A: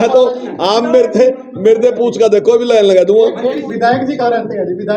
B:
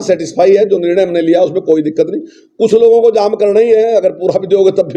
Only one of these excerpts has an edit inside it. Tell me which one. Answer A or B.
A